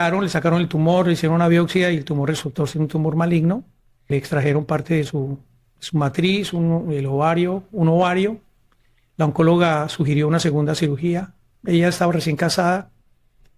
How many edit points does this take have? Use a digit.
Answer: 2